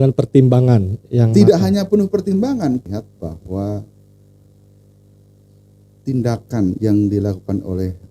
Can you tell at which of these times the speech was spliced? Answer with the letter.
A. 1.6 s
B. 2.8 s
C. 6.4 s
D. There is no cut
B